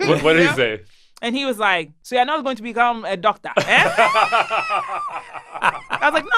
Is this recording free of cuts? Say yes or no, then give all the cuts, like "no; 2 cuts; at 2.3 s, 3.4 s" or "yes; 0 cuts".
no; 1 cut; at 2.0 s